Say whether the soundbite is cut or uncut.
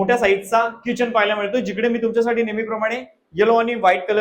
uncut